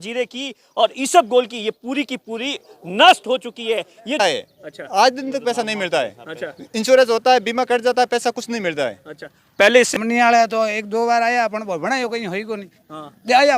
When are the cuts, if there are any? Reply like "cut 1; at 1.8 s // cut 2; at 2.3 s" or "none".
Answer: cut 1; at 4.2 s // cut 2; at 9.9 s